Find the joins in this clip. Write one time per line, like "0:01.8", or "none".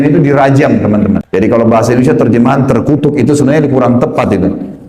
0:01.3